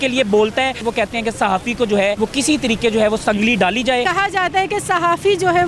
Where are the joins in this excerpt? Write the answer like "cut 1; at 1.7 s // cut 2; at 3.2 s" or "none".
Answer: cut 1; at 0.8 s // cut 2; at 2.2 s // cut 3; at 4.1 s